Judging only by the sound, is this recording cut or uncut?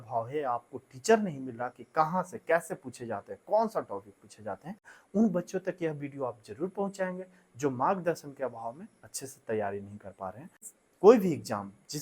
cut